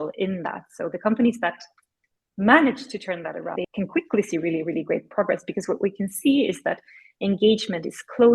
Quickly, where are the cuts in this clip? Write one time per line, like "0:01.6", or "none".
0:03.6